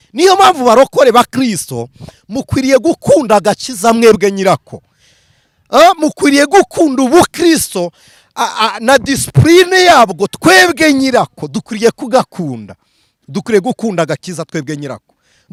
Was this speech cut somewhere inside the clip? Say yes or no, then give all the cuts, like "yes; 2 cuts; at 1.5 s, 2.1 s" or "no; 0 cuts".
no; 0 cuts